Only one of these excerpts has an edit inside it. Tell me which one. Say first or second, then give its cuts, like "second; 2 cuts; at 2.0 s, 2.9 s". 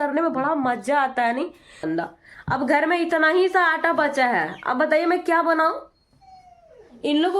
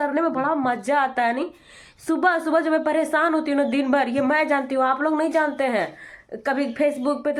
first; 1 cut; at 1.8 s